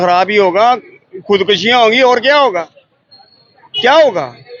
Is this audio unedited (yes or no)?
yes